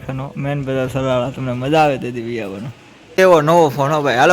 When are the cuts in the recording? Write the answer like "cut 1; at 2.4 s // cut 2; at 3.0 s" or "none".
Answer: cut 1; at 3.1 s